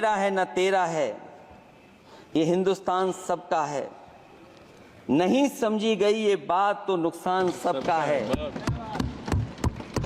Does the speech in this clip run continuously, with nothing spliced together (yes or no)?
yes